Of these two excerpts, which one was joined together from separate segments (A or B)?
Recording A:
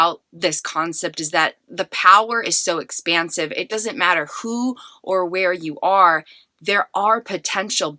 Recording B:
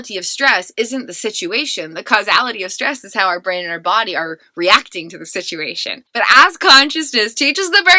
B